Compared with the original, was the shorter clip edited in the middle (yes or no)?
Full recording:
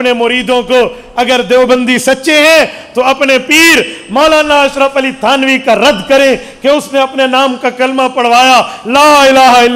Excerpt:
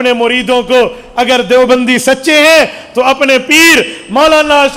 no